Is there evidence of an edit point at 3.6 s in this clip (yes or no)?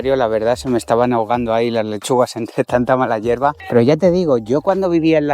yes